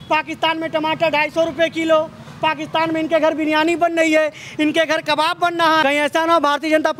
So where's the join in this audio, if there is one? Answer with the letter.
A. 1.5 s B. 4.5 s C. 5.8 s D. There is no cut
C